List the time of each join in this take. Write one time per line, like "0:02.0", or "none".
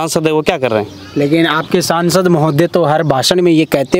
0:01.0